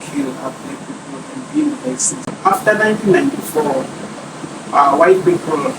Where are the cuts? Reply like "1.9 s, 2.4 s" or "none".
2.3 s